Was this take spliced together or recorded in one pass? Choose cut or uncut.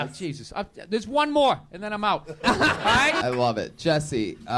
cut